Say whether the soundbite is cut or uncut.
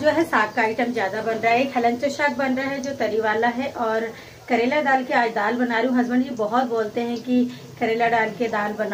uncut